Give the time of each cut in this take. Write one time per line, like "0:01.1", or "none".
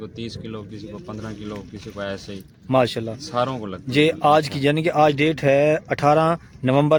none